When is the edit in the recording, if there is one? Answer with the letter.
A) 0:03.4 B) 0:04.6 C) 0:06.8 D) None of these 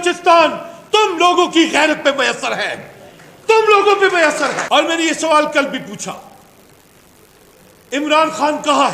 B